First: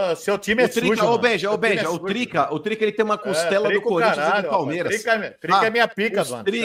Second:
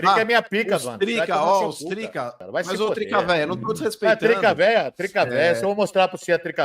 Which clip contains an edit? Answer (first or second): second